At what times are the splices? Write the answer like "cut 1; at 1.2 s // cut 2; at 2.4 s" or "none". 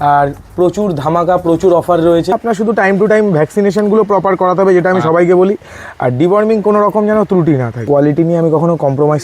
cut 1; at 2.4 s // cut 2; at 7.8 s